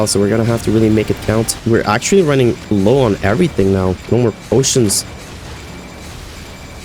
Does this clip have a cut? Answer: yes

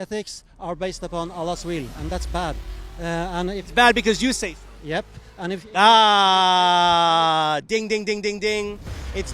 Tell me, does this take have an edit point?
no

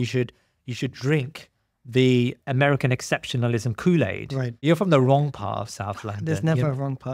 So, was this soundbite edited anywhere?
yes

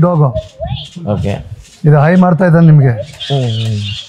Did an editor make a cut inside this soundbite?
no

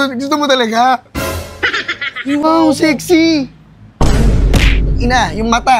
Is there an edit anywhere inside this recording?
yes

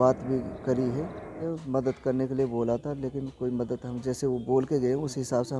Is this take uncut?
no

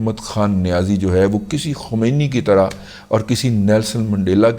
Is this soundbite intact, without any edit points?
yes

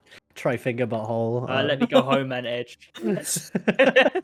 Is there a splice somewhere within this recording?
no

